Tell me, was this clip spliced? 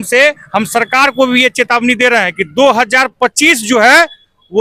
no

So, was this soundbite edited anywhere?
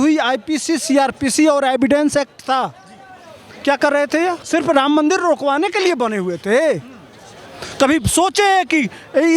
yes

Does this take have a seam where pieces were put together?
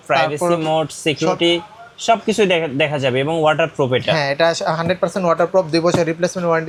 no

